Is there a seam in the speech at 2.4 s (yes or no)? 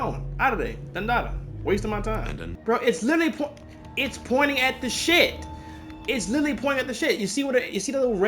yes